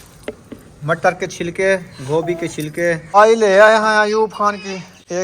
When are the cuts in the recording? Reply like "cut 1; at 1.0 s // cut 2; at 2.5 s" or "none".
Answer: cut 1; at 3.2 s